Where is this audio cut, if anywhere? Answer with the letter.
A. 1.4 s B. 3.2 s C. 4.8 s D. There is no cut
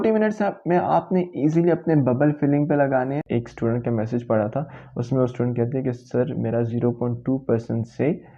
B